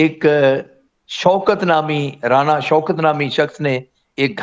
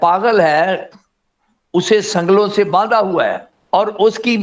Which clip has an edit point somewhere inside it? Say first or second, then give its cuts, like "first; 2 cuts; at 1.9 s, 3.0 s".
second; 1 cut; at 3.5 s